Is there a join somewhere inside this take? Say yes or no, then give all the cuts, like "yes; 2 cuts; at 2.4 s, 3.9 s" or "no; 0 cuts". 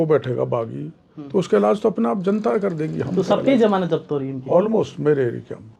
no; 0 cuts